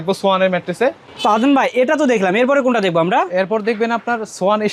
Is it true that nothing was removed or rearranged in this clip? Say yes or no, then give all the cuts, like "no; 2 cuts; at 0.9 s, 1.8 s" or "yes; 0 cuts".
yes; 0 cuts